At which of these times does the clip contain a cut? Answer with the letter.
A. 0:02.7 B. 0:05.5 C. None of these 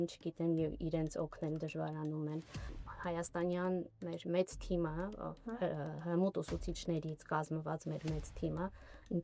A